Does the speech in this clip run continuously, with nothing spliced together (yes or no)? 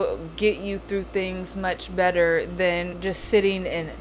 no